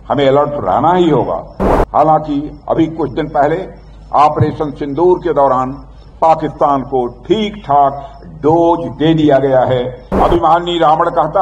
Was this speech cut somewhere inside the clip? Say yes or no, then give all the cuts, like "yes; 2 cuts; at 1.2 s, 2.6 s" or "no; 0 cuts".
yes; 1 cut; at 10.0 s